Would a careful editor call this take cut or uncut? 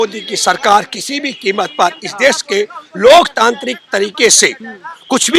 uncut